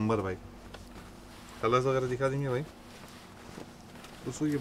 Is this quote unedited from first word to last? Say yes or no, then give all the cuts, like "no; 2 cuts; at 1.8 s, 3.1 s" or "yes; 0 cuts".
yes; 0 cuts